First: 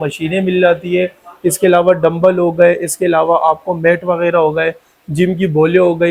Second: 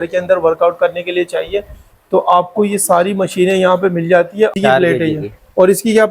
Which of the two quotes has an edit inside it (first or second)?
second